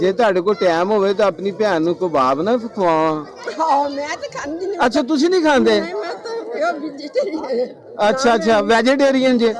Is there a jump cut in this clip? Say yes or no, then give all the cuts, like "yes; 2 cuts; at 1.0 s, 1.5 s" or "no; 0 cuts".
no; 0 cuts